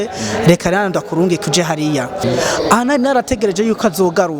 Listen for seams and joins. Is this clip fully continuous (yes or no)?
no